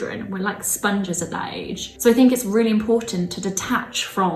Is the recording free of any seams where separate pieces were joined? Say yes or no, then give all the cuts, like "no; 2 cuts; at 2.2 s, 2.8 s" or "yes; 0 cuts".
no; 1 cut; at 1.8 s